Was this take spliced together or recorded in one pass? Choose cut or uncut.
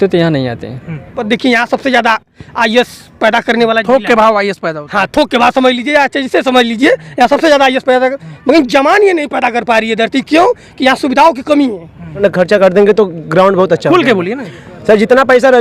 cut